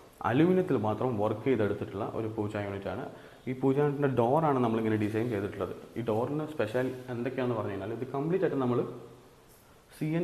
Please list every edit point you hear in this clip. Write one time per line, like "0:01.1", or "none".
none